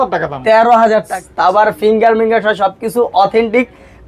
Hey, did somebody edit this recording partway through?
yes; 1 cut; at 1.2 s

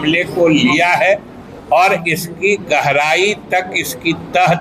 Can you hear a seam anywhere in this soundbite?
no; 0 cuts

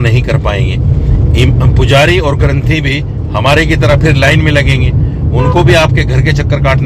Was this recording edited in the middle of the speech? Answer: no; 0 cuts

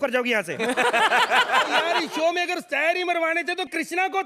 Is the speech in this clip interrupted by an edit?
yes; 1 cut; at 1.9 s

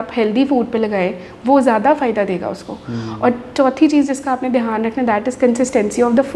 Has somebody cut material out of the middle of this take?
no; 0 cuts

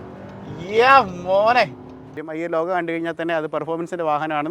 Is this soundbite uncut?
no; 1 cut; at 2.2 s

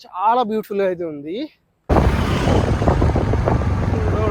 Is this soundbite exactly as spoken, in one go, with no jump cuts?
yes; 0 cuts

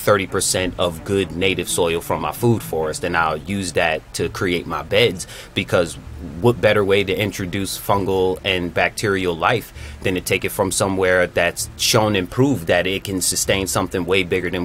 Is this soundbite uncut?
yes; 0 cuts

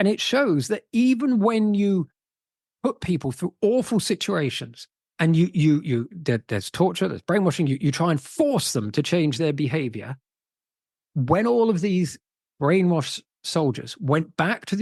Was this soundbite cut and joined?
no; 0 cuts

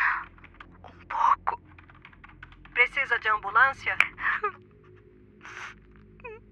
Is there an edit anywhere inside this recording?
yes; 1 cut; at 4.0 s

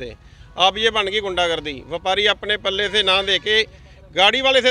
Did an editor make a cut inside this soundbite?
no; 0 cuts

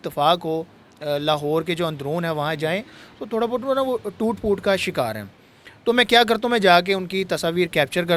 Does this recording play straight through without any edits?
yes; 0 cuts

